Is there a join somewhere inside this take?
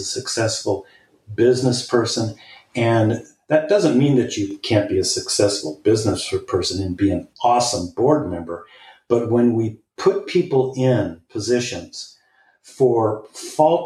no; 0 cuts

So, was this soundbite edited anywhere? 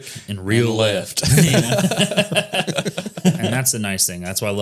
yes; 1 cut; at 3.5 s

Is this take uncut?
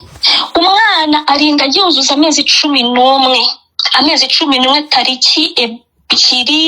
yes; 0 cuts

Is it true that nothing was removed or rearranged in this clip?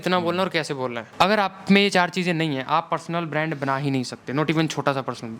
no; 1 cut; at 1.0 s

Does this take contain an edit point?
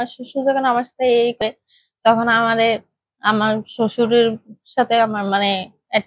yes; 1 cut; at 1.4 s

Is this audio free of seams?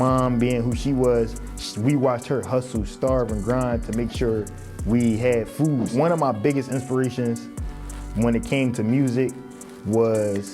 no; 1 cut; at 5.9 s

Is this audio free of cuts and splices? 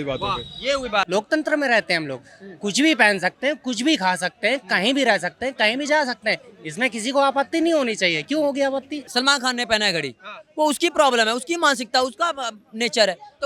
no; 2 cuts; at 1.1 s, 9.0 s

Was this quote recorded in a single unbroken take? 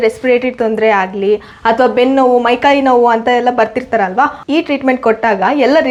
yes; 0 cuts

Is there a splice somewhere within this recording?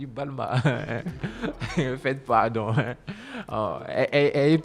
no; 0 cuts

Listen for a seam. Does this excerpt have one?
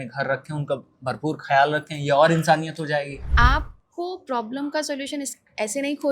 yes; 1 cut; at 3.2 s

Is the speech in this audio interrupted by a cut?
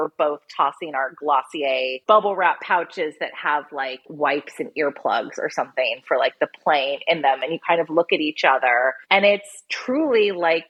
no; 0 cuts

